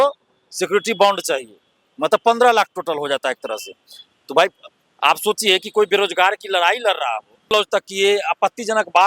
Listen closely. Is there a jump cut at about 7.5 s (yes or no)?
yes